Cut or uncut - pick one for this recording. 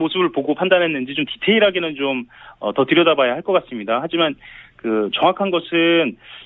cut